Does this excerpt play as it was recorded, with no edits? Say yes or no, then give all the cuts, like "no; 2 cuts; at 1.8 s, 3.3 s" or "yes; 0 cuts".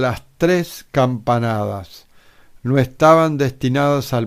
yes; 0 cuts